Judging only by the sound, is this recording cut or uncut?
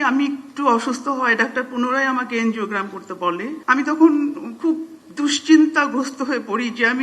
cut